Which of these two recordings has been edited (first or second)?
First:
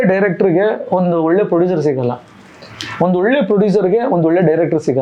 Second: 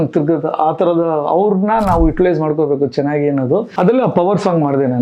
second